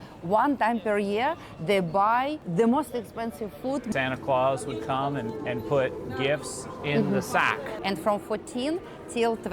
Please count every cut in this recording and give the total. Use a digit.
3